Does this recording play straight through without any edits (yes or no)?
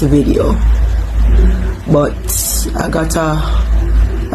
yes